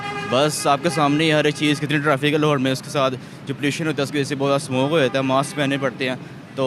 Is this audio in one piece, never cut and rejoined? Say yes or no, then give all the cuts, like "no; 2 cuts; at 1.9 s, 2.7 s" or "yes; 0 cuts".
yes; 0 cuts